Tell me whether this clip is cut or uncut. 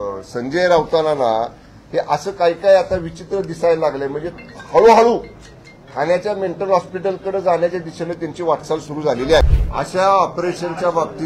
cut